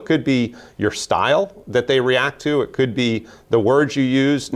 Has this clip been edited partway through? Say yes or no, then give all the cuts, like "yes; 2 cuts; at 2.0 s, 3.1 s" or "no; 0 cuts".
no; 0 cuts